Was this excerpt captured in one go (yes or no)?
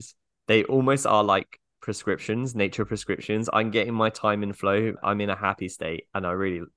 no